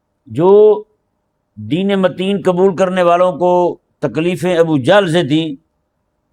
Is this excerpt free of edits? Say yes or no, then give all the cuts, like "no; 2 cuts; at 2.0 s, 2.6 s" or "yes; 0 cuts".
yes; 0 cuts